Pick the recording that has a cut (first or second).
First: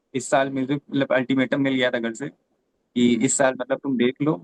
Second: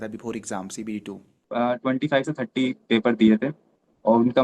second